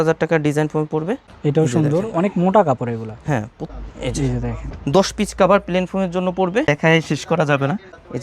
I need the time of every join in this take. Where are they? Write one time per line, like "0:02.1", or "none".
0:03.6
0:06.7